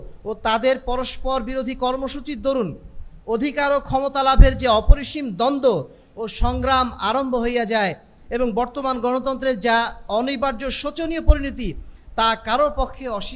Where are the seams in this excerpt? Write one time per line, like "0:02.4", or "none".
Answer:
none